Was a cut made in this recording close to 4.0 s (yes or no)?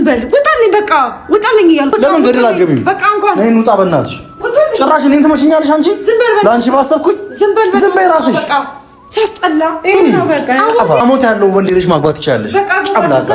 no